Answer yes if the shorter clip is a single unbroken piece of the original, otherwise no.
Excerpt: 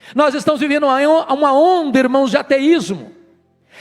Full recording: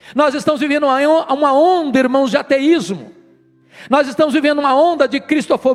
yes